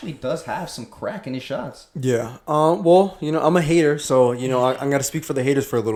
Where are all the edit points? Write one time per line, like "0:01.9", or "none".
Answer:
none

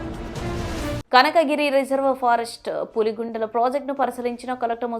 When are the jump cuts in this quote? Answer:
0:01.0

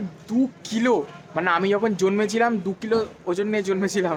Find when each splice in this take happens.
none

